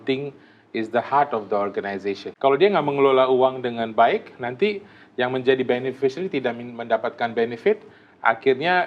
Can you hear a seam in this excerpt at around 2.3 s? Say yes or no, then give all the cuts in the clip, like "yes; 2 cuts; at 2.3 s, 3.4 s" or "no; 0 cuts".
yes; 1 cut; at 2.3 s